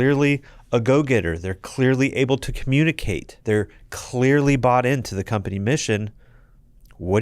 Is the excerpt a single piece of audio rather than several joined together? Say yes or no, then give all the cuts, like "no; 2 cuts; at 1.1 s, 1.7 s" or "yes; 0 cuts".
no; 1 cut; at 3.3 s